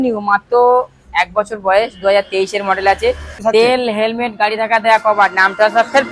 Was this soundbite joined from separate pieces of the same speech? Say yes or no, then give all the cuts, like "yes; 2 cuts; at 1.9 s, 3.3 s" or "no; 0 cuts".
yes; 1 cut; at 3.4 s